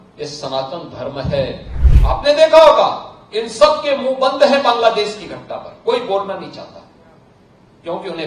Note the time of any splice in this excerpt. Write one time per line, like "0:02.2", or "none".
0:01.7